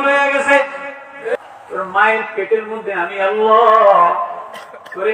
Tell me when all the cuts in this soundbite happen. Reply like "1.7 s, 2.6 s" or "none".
1.3 s

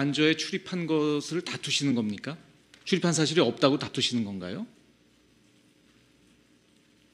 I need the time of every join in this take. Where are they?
none

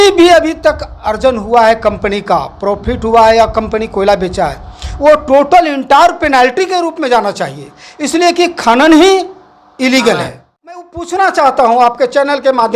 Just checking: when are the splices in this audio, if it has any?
10.4 s

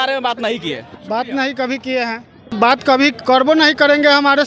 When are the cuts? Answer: 2.7 s

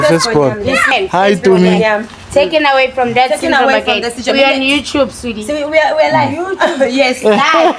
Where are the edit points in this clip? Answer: 0.9 s

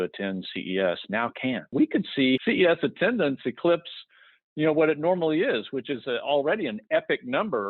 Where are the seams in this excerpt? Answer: 1.7 s, 2.4 s

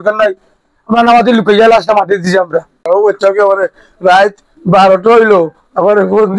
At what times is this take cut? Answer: 2.9 s

